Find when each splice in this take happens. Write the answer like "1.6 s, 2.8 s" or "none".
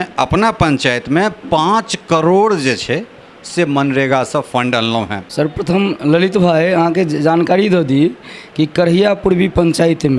5.2 s